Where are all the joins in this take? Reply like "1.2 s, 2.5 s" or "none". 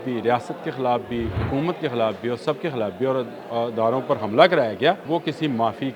1.4 s, 5.0 s